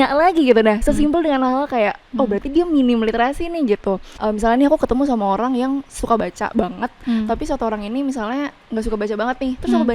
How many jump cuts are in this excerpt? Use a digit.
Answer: 1